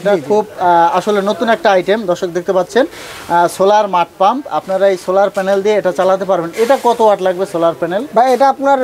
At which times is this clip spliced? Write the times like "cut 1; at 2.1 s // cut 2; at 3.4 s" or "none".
none